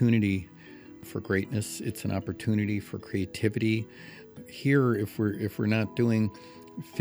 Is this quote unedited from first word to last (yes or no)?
no